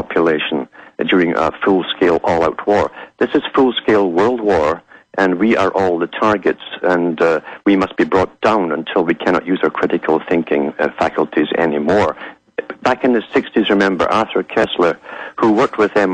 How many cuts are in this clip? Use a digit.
1